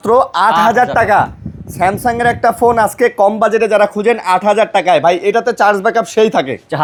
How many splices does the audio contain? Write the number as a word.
zero